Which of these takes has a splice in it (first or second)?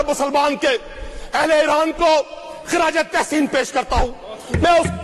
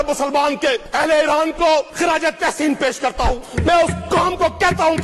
second